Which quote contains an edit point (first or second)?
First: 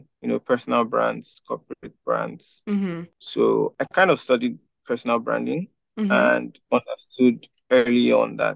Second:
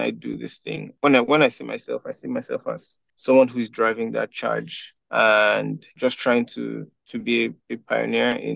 first